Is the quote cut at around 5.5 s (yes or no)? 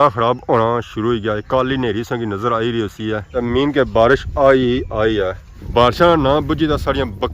yes